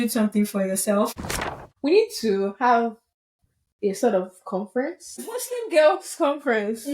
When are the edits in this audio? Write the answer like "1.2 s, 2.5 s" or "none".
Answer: 1.1 s, 5.3 s